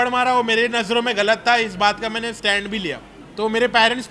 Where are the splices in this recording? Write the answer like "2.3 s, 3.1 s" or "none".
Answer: 3.1 s